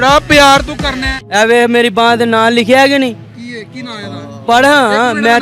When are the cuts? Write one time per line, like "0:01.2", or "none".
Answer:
0:01.2

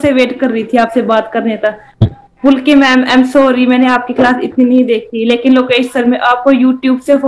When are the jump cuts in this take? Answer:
none

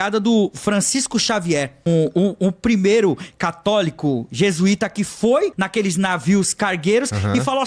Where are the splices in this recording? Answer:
0:01.9
0:05.6

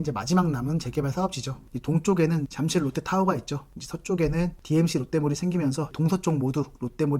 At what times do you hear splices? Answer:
0:01.6

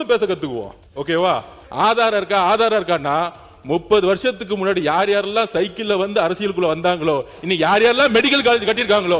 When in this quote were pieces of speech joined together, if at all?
0:01.6

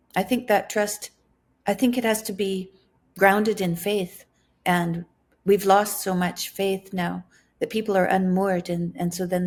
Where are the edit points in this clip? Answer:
none

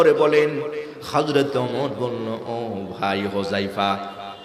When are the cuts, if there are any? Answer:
none

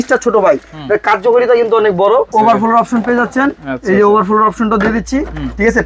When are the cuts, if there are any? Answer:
0:02.3

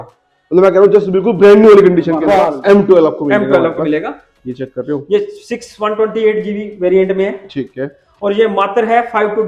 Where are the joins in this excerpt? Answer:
0:02.4

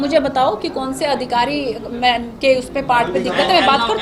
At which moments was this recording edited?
none

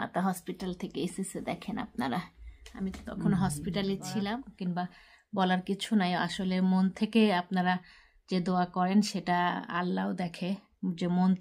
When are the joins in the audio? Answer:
0:04.5

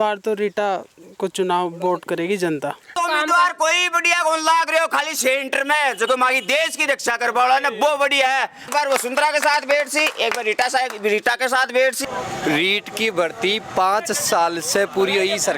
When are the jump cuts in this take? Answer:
0:03.0
0:08.7
0:12.0

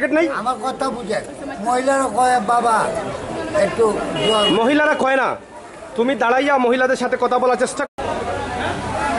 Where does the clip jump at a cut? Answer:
0:07.8

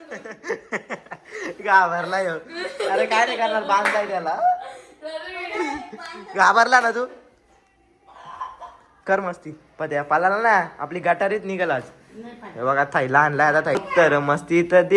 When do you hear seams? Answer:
0:13.8

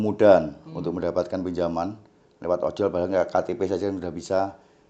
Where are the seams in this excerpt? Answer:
none

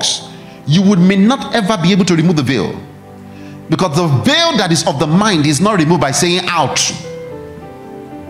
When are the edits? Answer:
none

